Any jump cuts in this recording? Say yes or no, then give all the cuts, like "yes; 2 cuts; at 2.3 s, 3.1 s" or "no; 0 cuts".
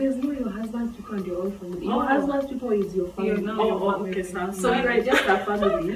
no; 0 cuts